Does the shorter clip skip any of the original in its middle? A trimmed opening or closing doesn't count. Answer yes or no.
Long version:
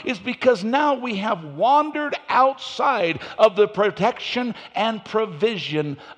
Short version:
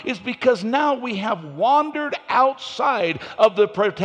no